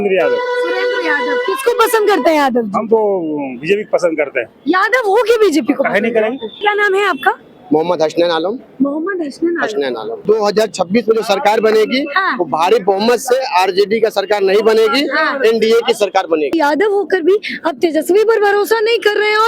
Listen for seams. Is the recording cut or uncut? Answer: cut